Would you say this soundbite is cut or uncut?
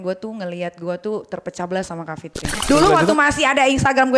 cut